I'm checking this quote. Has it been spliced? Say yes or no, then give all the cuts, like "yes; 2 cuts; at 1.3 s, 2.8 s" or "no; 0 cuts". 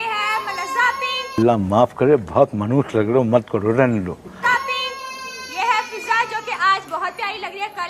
no; 0 cuts